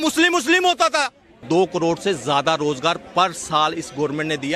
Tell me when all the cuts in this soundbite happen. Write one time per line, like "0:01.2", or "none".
0:01.4